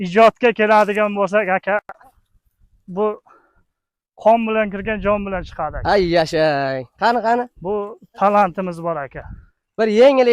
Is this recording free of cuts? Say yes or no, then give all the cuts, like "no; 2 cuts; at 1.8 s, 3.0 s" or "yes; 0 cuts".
yes; 0 cuts